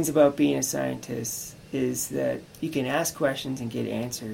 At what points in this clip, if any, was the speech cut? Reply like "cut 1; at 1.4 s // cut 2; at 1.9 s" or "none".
cut 1; at 2.5 s